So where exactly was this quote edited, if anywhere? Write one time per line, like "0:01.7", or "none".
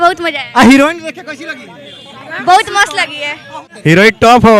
0:03.7